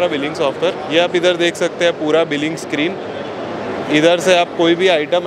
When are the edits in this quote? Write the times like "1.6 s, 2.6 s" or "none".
none